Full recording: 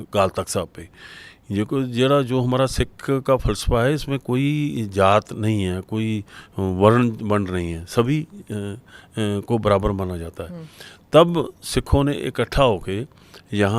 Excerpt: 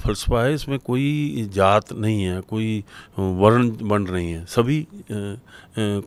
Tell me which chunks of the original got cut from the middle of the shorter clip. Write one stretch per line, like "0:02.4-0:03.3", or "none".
none